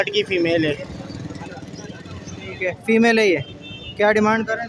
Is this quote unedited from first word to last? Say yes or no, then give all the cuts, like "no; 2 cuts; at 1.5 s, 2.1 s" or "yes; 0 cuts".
yes; 0 cuts